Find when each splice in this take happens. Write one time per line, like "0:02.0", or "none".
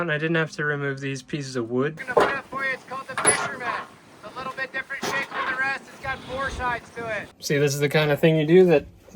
0:02.0
0:07.3